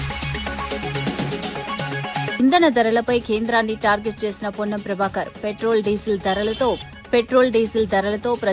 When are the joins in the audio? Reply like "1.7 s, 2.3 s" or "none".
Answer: 0.8 s, 2.3 s